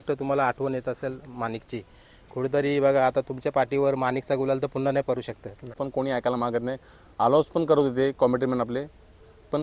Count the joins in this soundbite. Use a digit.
1